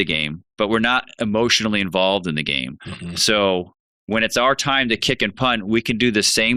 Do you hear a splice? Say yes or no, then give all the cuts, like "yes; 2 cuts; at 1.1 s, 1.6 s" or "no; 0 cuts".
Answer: no; 0 cuts